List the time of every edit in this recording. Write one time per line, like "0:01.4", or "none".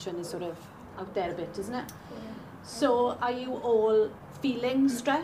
0:04.2